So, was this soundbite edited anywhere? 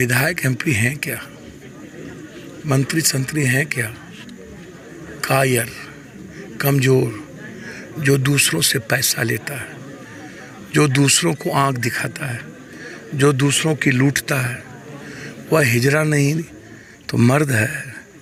no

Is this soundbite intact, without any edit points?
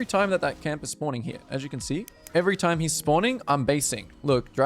no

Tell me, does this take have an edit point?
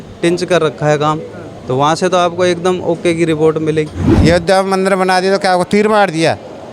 yes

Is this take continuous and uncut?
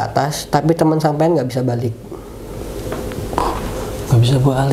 yes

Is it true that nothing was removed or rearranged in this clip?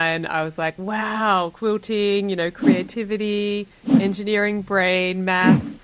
yes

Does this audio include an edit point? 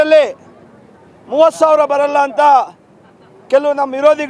no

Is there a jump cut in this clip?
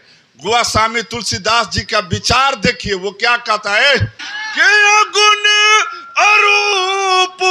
yes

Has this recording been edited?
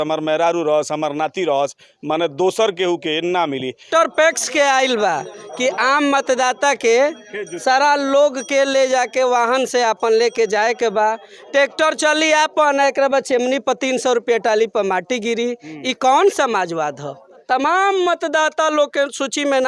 yes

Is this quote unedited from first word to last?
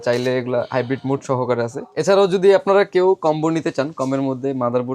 no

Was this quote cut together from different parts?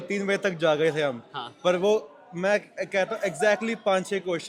no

